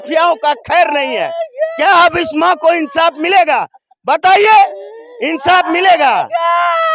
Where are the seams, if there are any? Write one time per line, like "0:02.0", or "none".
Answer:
none